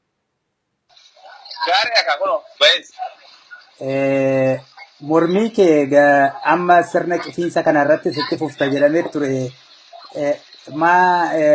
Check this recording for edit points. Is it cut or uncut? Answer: uncut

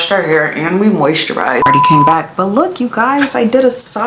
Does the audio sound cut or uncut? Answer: cut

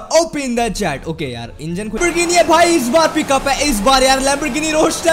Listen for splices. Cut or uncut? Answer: cut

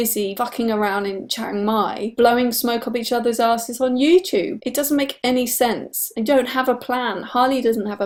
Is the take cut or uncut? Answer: uncut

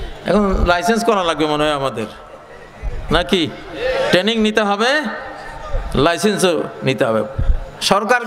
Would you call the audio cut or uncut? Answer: uncut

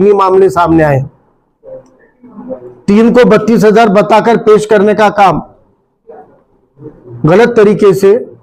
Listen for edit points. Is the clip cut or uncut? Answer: uncut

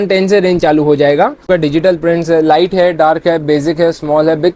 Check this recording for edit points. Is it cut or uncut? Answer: cut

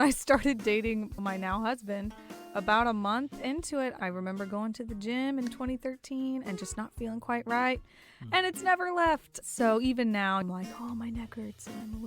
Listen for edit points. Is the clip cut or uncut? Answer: cut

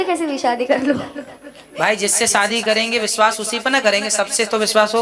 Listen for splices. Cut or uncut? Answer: uncut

